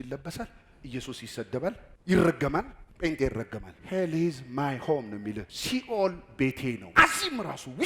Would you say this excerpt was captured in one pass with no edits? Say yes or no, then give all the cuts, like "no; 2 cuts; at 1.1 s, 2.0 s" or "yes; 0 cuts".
no; 3 cuts; at 3.7 s, 5.5 s, 6.8 s